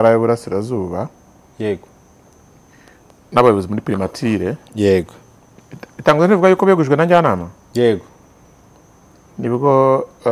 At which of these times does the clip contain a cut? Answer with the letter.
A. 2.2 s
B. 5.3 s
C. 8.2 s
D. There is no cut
D